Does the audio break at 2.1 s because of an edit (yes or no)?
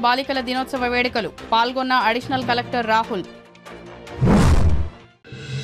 no